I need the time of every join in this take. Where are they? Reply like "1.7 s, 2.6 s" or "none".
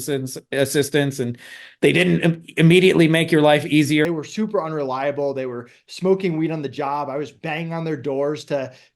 4.0 s